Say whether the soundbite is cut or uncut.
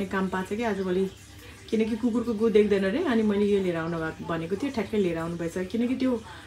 uncut